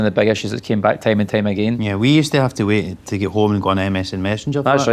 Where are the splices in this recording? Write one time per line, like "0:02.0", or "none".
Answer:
0:01.8